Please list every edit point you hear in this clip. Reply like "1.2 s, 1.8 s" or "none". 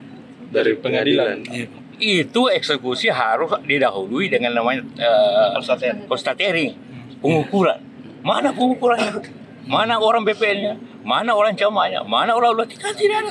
none